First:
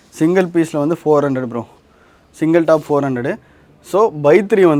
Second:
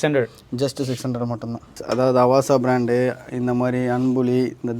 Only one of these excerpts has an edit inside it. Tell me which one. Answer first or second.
second